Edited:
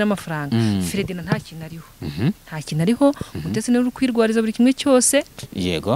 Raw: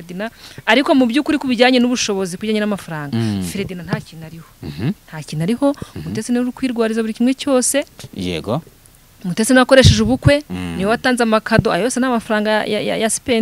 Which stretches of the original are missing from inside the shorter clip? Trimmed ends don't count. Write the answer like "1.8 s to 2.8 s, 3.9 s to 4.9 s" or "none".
none